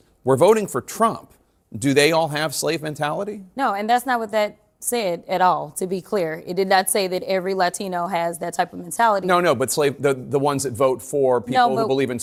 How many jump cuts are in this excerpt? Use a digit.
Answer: 0